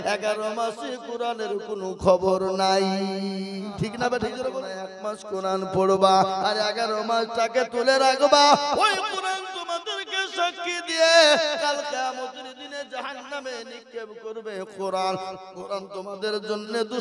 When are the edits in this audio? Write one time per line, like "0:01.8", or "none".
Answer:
0:04.7